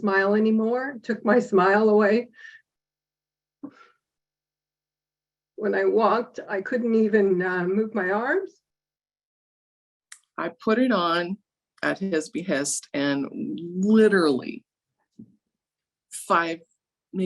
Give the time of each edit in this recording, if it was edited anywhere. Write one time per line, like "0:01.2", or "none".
0:09.6